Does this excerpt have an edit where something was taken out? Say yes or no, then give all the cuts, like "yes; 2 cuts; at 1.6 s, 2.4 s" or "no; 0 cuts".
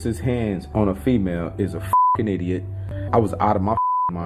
no; 0 cuts